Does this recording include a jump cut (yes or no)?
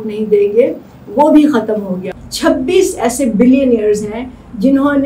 yes